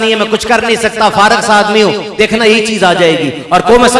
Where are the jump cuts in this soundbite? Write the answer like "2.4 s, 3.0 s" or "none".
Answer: none